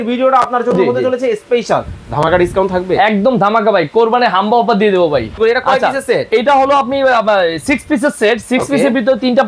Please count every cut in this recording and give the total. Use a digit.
1